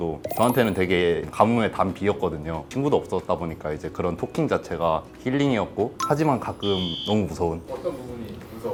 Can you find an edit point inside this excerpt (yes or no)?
no